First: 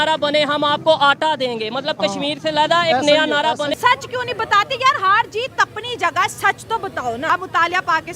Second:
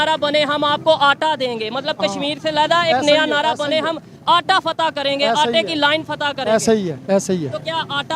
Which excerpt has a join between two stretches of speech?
first; 2 cuts; at 3.7 s, 7.3 s

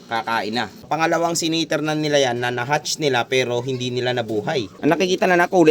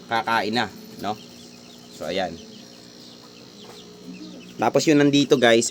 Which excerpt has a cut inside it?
first; 2 cuts; at 1.0 s, 4.6 s

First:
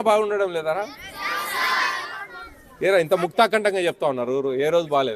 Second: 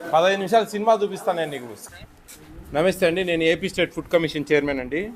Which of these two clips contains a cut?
second; 1 cut; at 1.8 s

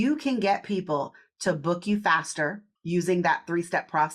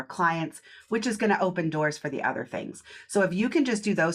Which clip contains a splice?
first; 1 cut; at 2.7 s

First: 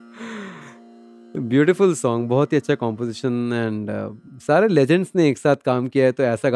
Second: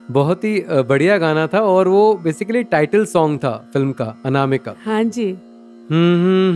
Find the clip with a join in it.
second; 1 cut; at 5.3 s

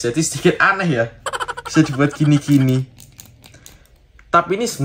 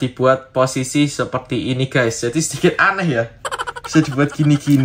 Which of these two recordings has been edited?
first; 1 cut; at 4.0 s

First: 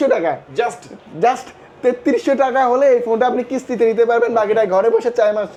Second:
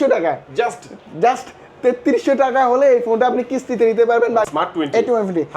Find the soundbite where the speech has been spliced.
second; 1 cut; at 4.5 s

